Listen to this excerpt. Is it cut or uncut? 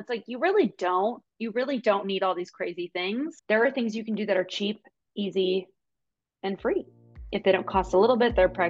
cut